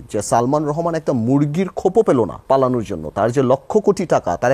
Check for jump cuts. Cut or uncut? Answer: cut